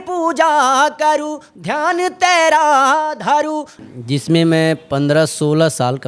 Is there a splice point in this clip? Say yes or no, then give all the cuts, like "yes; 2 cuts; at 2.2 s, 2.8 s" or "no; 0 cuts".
yes; 1 cut; at 3.7 s